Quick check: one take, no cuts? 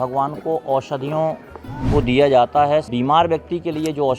no; 1 cut; at 2.9 s

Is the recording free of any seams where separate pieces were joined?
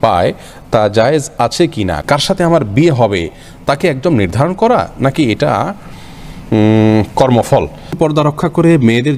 no; 2 cuts; at 2.0 s, 7.9 s

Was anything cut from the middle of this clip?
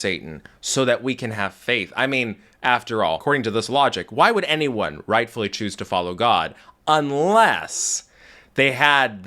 yes; 1 cut; at 3.2 s

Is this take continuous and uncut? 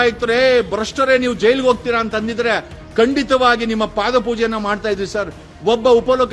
yes; 0 cuts

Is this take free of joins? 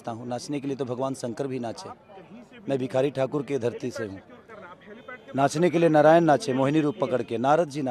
yes; 0 cuts

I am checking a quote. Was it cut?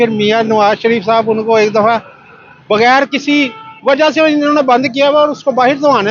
no; 0 cuts

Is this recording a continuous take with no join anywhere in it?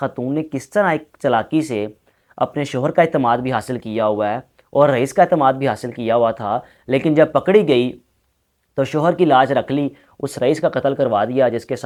yes; 0 cuts

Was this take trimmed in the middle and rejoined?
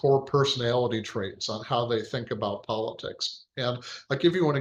no; 0 cuts

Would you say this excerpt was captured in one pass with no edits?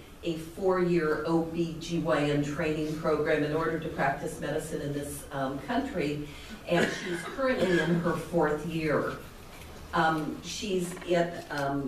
yes; 0 cuts

